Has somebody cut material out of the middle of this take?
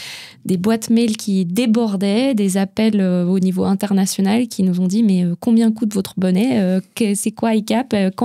no; 0 cuts

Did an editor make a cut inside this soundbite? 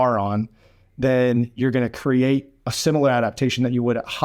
no; 0 cuts

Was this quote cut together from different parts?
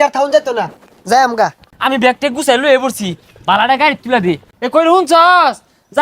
yes; 2 cuts; at 1.6 s, 4.5 s

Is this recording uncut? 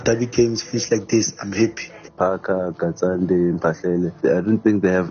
no; 2 cuts; at 2.1 s, 4.2 s

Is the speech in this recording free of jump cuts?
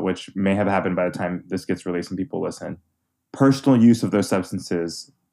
yes; 0 cuts

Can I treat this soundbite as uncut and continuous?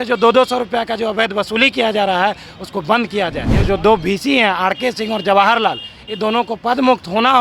no; 1 cut; at 3.5 s

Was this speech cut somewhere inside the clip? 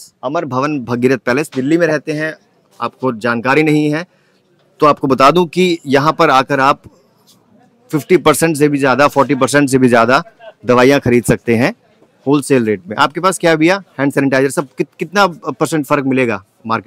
no; 0 cuts

